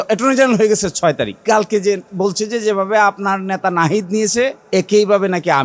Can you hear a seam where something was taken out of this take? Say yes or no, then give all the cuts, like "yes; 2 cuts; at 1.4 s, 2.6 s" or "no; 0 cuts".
yes; 2 cuts; at 1.3 s, 4.6 s